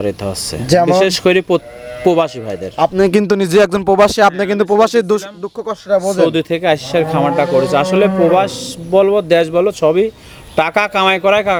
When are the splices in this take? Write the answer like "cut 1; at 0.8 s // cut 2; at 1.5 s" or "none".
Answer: none